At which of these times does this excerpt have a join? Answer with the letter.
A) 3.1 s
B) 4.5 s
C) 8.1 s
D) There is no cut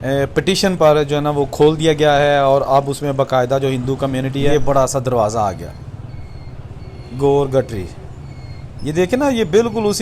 B